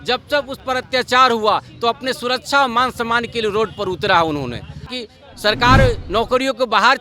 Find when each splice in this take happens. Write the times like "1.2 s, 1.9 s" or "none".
4.9 s